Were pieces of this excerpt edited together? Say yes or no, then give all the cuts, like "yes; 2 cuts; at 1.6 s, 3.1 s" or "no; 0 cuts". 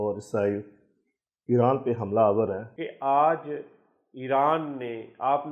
yes; 1 cut; at 2.7 s